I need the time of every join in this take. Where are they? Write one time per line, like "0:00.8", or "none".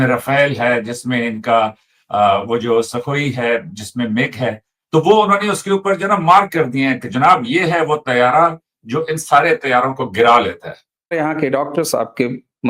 0:11.1